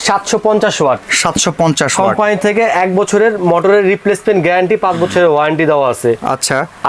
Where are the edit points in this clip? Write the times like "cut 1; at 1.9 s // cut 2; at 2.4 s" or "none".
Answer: none